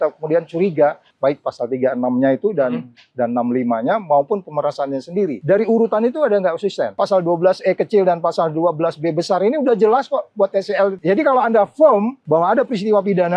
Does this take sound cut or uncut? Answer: cut